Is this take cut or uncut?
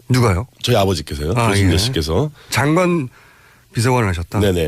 cut